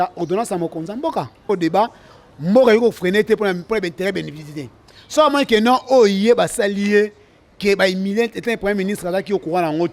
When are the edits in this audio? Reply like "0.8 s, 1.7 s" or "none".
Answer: 1.4 s